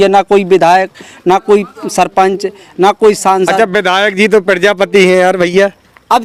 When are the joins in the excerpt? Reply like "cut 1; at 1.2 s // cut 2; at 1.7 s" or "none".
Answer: none